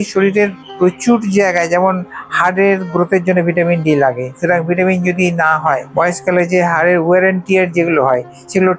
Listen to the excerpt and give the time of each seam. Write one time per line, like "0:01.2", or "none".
0:05.9